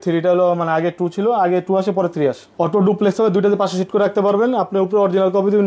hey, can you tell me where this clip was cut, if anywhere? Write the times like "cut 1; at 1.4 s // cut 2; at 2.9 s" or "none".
cut 1; at 2.4 s